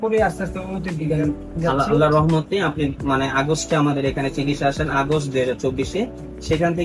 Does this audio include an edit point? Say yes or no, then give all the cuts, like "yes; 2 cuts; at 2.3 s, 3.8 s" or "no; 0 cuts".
no; 0 cuts